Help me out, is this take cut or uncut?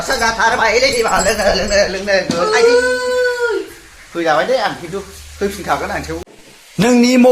cut